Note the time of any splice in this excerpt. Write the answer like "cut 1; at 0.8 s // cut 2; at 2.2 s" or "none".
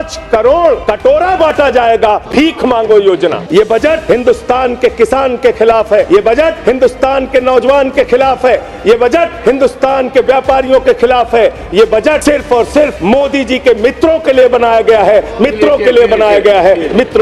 cut 1; at 0.9 s // cut 2; at 2.2 s // cut 3; at 3.7 s // cut 4; at 6.3 s // cut 5; at 9.4 s // cut 6; at 12.2 s // cut 7; at 13.0 s